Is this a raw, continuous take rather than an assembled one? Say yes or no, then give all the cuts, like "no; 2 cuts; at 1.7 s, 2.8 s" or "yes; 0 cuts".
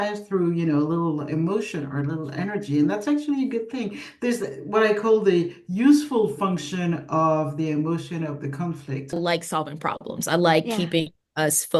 no; 1 cut; at 9.1 s